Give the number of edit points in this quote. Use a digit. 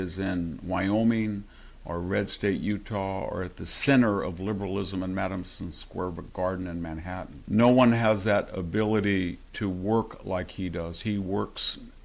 2